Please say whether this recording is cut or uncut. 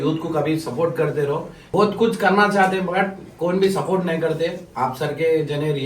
cut